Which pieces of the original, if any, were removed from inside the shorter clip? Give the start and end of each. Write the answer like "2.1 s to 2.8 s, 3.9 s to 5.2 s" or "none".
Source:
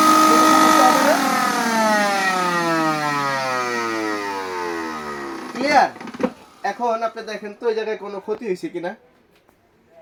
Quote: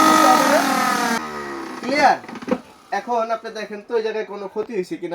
1.7 s to 4.9 s